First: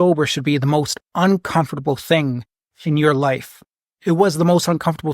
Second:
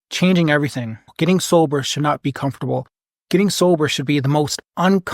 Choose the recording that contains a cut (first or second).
second